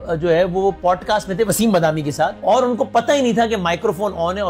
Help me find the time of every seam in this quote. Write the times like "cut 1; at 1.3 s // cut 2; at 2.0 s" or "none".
cut 1; at 2.4 s